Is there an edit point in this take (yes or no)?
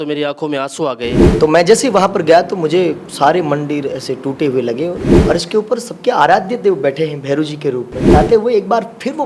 yes